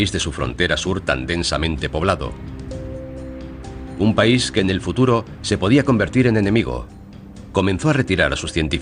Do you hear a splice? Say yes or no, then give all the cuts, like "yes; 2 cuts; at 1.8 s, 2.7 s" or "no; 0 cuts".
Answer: no; 0 cuts